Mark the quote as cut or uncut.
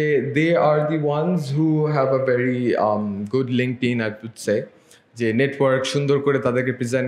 uncut